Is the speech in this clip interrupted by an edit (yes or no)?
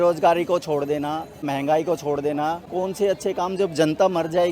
yes